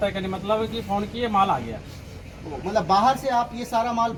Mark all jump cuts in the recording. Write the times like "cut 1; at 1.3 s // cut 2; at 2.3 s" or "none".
none